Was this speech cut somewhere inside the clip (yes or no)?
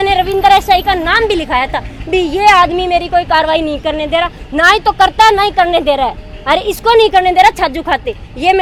no